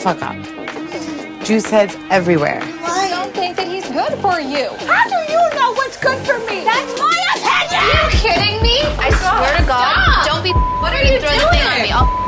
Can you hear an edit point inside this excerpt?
no; 0 cuts

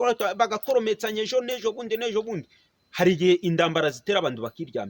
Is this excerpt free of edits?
yes; 0 cuts

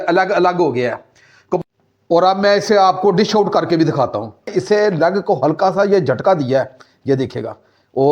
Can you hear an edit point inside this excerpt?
yes; 1 cut; at 4.5 s

